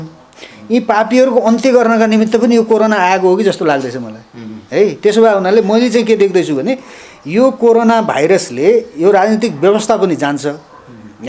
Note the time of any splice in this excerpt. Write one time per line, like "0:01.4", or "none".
none